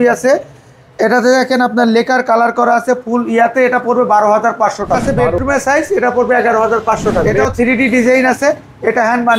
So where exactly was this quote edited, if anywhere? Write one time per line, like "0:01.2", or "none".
0:05.0
0:07.3